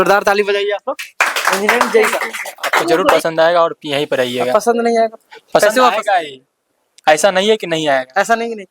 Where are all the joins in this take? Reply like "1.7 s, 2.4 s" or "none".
3.0 s